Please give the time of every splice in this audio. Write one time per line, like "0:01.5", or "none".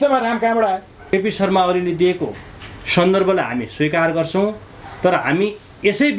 0:01.1

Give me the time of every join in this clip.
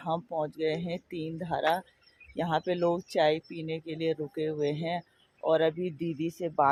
none

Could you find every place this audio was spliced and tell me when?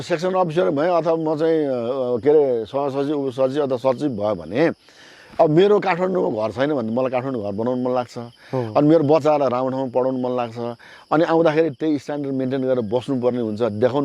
none

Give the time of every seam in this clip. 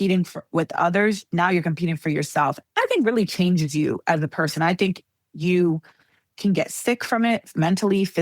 0:02.6

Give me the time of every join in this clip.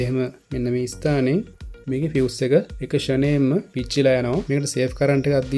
0:04.4

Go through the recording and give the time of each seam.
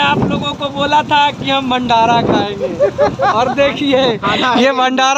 none

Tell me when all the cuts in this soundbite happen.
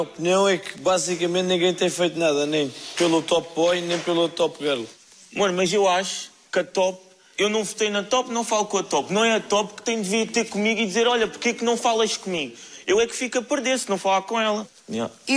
none

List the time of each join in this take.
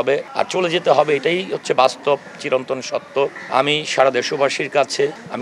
none

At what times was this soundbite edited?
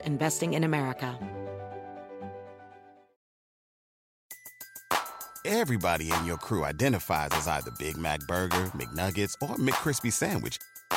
0:01.1

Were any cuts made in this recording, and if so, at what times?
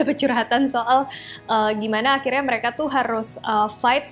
none

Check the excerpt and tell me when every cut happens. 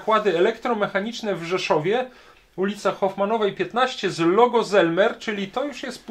none

